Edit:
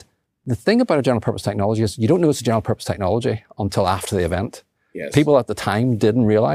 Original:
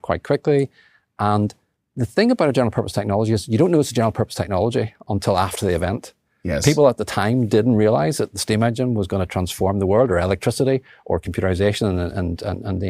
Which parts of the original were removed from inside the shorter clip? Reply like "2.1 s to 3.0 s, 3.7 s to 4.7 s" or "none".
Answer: none